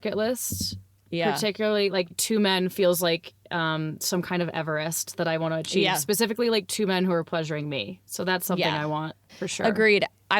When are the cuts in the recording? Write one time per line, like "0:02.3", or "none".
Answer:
0:02.1
0:09.2